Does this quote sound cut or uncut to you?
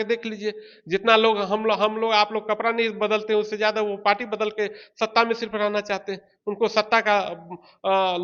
uncut